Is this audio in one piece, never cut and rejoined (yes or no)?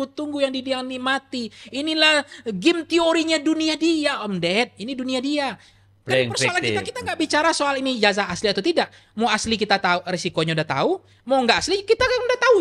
yes